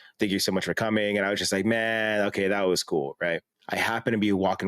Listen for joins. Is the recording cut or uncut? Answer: cut